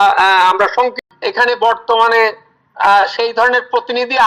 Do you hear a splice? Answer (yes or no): yes